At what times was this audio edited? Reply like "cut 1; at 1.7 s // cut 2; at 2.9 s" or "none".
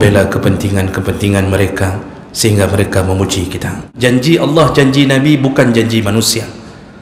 cut 1; at 3.9 s